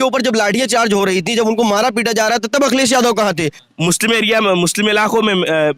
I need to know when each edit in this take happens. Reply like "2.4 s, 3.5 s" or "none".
3.6 s